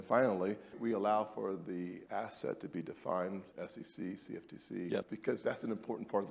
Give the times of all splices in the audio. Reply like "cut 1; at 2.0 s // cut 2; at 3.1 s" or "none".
cut 1; at 0.8 s // cut 2; at 2.0 s // cut 3; at 3.5 s // cut 4; at 5.1 s